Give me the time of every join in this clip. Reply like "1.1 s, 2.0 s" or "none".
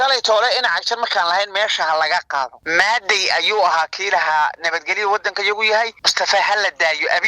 2.6 s, 6.0 s